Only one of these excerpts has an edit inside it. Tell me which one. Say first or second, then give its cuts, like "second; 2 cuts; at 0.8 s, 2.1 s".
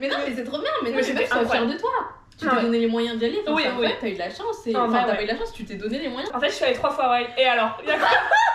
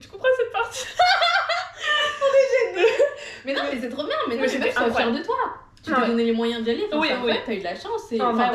first; 1 cut; at 6.3 s